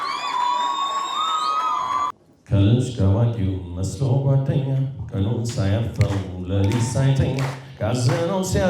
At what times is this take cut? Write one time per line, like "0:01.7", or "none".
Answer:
0:02.1